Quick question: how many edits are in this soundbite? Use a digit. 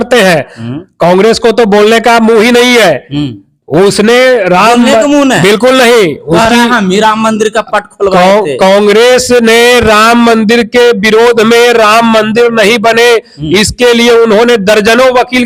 0